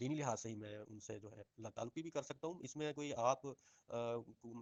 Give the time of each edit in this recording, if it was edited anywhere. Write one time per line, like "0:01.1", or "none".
none